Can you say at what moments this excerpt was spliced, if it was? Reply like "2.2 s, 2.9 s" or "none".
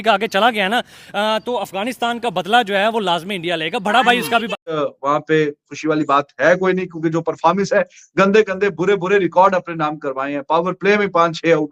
4.8 s